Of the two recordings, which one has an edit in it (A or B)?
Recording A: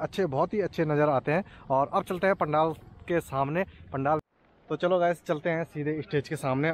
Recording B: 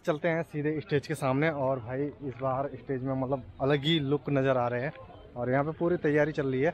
A